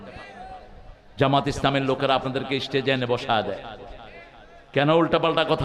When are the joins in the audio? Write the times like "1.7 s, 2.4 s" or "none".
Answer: none